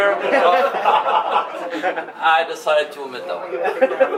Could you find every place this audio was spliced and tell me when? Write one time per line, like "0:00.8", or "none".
none